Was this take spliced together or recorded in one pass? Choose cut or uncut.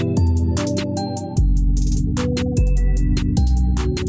uncut